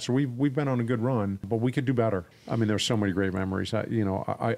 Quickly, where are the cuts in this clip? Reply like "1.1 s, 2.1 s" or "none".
1.4 s, 2.3 s